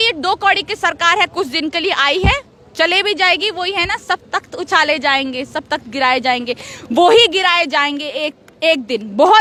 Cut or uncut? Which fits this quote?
uncut